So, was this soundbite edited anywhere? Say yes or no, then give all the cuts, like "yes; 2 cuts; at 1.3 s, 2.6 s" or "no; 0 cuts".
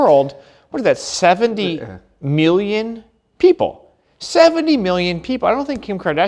no; 0 cuts